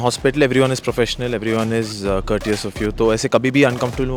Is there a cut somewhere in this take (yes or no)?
no